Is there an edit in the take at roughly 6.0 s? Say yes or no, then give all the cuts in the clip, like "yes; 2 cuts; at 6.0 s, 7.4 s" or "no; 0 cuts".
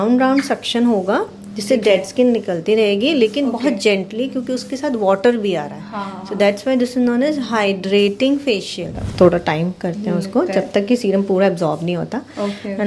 no; 1 cut; at 9.0 s